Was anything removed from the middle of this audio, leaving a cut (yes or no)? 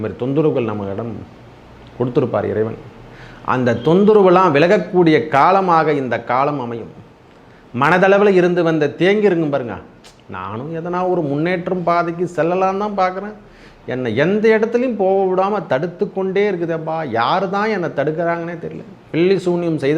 no